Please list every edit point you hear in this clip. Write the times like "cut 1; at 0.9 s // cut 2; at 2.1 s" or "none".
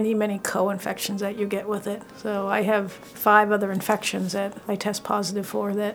cut 1; at 2.1 s // cut 2; at 3.0 s // cut 3; at 4.6 s